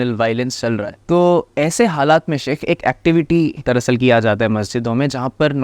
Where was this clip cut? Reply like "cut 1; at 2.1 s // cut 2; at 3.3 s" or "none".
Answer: cut 1; at 0.9 s // cut 2; at 3.6 s